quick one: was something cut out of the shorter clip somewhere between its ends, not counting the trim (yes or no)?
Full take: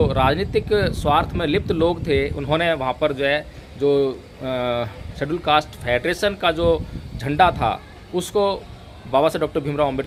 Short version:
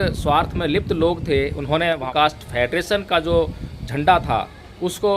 yes